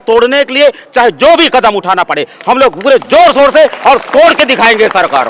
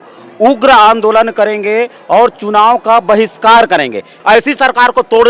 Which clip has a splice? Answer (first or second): second